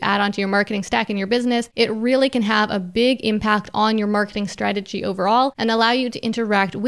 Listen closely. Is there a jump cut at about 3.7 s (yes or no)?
no